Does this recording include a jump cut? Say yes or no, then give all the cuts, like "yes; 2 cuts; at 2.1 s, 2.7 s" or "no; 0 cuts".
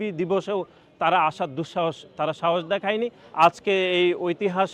yes; 1 cut; at 3.2 s